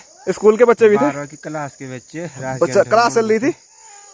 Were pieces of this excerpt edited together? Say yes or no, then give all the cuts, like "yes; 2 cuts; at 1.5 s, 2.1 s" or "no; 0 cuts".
no; 0 cuts